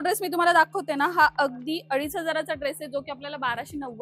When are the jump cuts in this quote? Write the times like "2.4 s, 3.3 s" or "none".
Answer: none